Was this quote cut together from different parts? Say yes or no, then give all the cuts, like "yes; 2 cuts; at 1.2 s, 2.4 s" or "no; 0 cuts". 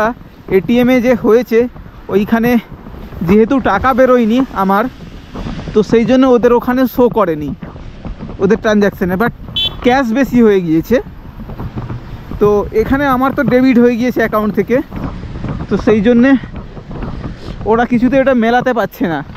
no; 0 cuts